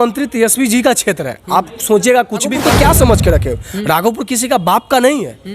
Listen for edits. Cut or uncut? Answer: cut